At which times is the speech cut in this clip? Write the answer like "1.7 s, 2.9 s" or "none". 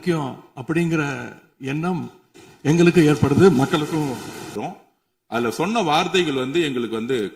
4.6 s